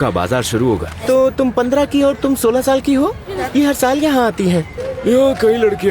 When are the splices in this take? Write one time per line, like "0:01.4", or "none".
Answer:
0:00.9
0:03.3
0:04.8